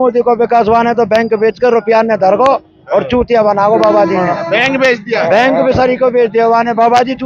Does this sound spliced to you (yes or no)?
no